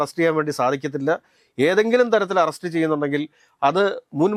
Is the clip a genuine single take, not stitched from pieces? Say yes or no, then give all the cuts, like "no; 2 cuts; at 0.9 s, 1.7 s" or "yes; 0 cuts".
yes; 0 cuts